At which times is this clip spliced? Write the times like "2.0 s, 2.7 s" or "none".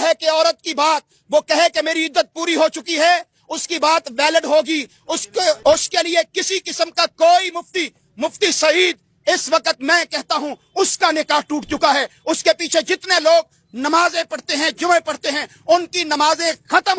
5.6 s